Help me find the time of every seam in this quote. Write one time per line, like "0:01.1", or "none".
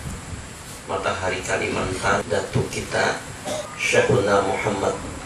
0:02.2
0:03.7